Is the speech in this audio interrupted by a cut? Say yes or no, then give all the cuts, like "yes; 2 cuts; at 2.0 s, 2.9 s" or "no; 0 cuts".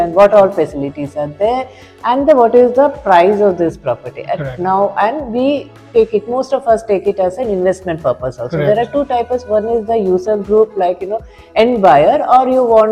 no; 0 cuts